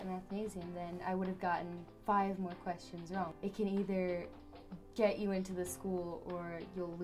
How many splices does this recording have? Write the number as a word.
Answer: one